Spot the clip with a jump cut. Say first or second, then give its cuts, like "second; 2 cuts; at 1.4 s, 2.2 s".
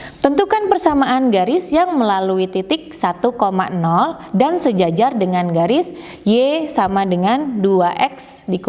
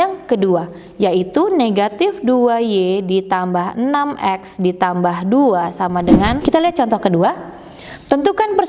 second; 1 cut; at 6.4 s